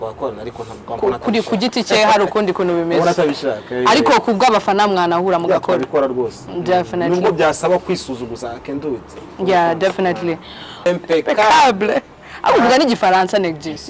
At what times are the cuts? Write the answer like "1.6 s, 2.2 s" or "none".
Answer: 10.8 s